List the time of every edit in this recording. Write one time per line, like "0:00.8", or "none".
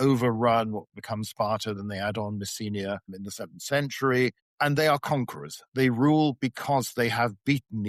0:03.1
0:04.4